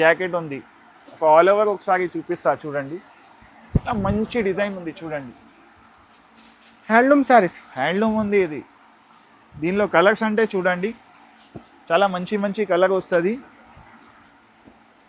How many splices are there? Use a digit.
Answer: 0